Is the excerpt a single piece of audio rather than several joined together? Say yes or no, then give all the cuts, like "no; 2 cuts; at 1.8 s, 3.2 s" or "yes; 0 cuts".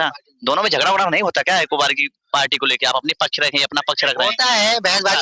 yes; 0 cuts